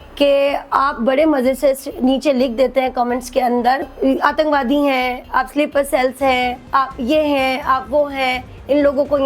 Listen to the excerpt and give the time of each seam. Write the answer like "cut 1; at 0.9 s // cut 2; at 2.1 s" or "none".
cut 1; at 3.9 s

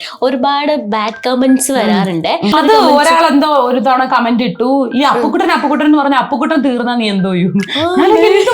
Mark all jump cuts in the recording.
cut 1; at 2.5 s

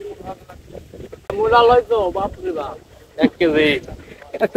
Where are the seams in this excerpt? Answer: cut 1; at 1.3 s

